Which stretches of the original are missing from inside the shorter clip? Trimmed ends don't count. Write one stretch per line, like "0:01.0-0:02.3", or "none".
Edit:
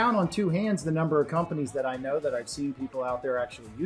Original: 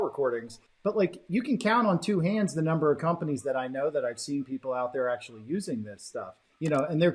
none